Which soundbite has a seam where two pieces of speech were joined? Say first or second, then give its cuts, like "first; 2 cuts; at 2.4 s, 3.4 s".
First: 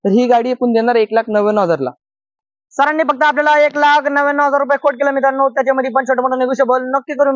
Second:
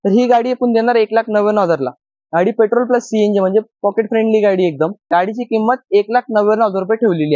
second; 2 cuts; at 2.1 s, 5.0 s